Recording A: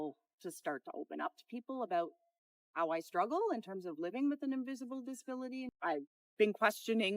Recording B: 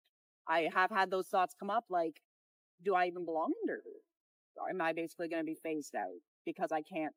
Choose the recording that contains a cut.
A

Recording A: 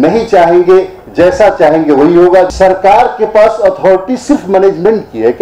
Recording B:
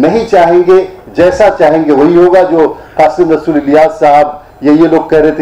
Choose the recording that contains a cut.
A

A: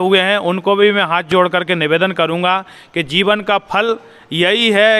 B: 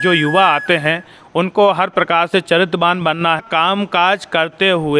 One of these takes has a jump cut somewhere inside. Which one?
B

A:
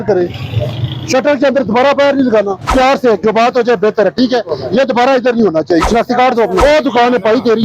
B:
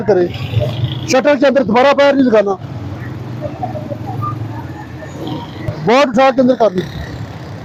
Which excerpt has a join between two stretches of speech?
A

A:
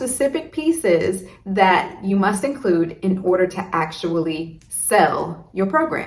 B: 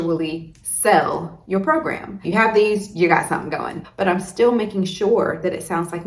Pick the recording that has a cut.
B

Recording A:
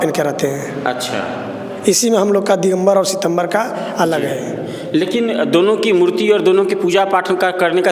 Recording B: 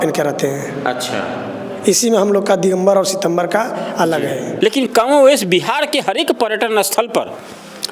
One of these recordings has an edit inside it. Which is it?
B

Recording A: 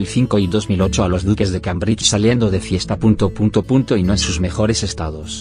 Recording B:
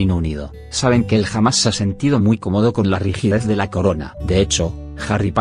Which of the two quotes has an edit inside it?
A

